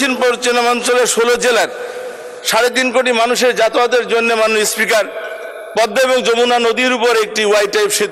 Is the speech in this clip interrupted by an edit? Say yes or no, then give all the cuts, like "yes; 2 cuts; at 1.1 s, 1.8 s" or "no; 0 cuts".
no; 0 cuts